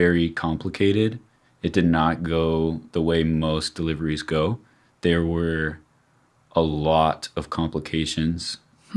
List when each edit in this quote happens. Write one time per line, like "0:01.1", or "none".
none